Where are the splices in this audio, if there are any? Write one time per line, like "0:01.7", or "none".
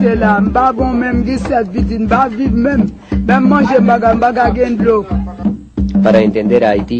0:02.0